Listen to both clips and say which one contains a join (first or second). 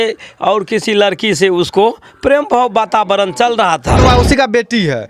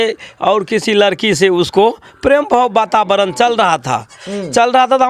first